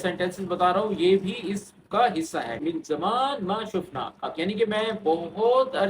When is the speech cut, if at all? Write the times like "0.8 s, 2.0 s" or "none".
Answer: 2.6 s, 4.3 s